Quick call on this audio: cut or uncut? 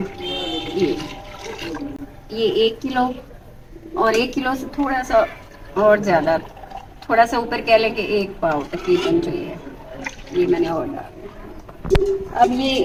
uncut